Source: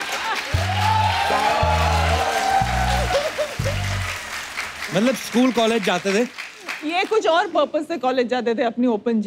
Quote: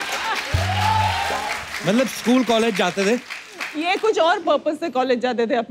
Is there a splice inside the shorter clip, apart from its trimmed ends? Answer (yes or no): yes